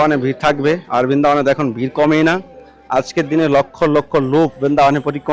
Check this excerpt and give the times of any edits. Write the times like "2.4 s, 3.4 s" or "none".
none